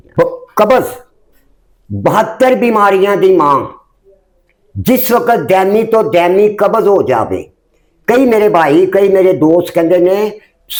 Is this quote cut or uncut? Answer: uncut